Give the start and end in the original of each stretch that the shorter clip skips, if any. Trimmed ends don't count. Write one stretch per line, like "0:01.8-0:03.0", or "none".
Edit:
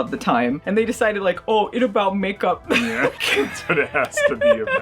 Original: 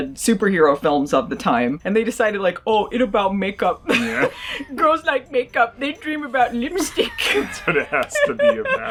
0:04.4-0:07.2